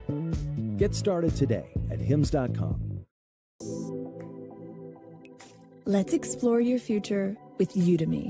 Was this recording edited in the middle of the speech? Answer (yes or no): yes